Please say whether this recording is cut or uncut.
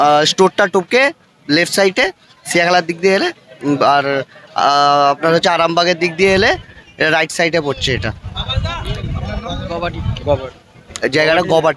uncut